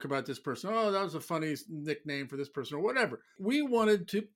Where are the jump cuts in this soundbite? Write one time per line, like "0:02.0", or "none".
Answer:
none